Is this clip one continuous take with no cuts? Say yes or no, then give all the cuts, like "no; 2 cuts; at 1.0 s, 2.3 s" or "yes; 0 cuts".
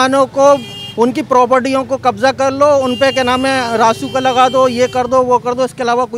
yes; 0 cuts